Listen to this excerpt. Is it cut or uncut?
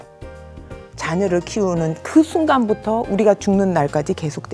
uncut